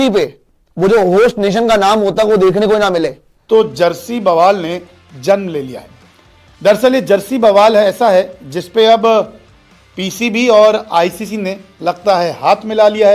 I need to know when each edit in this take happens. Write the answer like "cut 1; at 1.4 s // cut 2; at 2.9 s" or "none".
cut 1; at 3.3 s